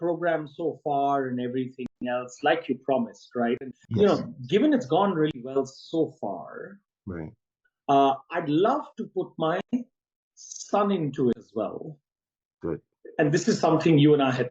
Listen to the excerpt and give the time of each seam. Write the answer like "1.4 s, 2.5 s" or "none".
3.8 s